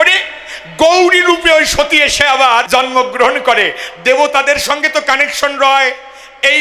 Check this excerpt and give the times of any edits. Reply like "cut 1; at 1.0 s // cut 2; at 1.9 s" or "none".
cut 1; at 2.7 s